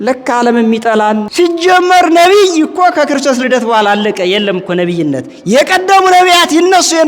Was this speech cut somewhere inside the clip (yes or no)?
yes